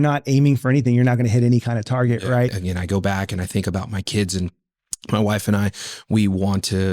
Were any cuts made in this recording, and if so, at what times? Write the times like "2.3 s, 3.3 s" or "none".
2.6 s